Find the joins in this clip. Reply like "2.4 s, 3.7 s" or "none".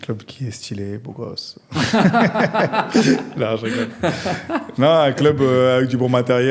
none